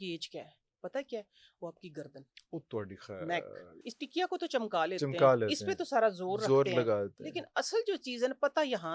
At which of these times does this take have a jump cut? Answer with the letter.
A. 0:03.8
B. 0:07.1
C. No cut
A